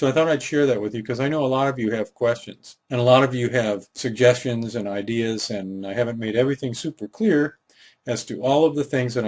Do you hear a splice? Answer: no; 0 cuts

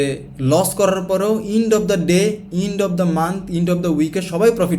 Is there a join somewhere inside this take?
no; 0 cuts

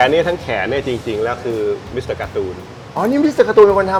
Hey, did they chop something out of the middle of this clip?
no; 0 cuts

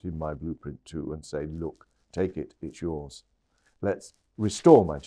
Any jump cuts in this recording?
no; 0 cuts

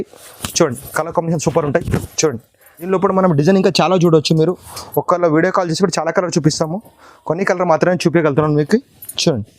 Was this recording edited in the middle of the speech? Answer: yes; 1 cut; at 2.9 s

